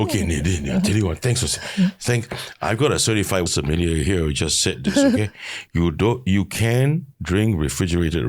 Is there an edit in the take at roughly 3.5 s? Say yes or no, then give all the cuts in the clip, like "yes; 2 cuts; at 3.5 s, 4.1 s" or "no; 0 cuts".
yes; 1 cut; at 3.5 s